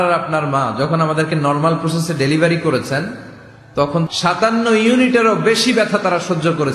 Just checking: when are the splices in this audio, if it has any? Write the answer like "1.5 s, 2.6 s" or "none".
4.1 s